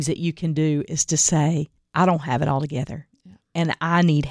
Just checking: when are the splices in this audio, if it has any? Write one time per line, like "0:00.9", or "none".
0:01.8